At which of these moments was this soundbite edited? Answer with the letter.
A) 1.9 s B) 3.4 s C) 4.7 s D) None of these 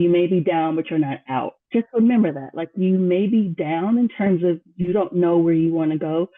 D